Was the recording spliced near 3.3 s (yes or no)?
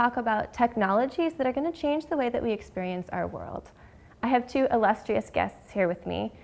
yes